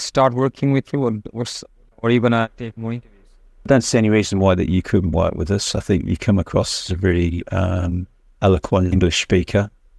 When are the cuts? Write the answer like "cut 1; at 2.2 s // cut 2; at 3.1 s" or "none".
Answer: none